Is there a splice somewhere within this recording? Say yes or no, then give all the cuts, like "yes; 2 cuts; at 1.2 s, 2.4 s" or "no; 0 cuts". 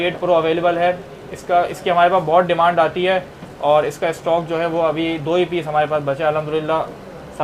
no; 0 cuts